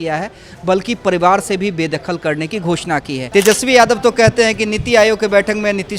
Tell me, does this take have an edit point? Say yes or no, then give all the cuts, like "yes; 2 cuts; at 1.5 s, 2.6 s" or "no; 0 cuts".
yes; 1 cut; at 3.2 s